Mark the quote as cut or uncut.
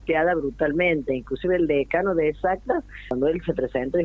cut